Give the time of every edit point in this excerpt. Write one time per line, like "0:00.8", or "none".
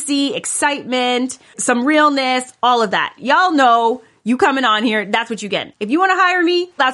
0:01.6
0:05.7